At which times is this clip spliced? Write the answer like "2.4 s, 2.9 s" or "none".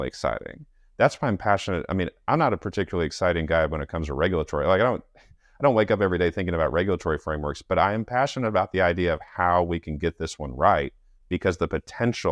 none